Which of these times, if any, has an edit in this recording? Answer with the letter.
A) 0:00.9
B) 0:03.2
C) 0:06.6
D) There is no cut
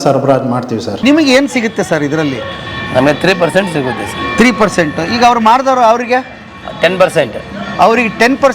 A